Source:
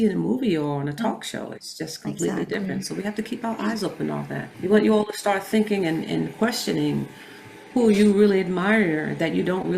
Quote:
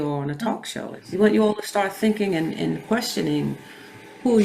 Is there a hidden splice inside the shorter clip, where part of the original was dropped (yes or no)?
yes